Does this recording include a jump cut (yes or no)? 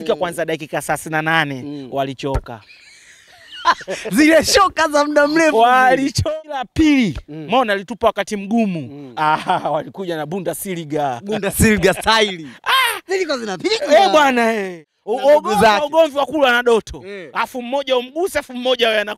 yes